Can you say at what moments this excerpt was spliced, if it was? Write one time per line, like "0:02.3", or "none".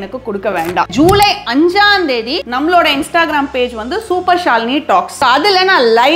0:00.9
0:02.4
0:05.1